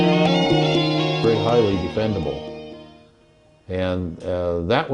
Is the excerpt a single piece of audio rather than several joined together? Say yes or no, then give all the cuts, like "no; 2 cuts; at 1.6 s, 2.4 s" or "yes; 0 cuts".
no; 1 cut; at 1.2 s